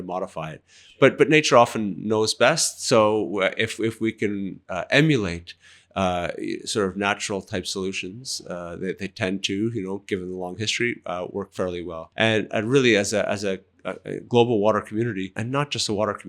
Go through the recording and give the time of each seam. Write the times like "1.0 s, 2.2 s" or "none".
12.0 s, 15.4 s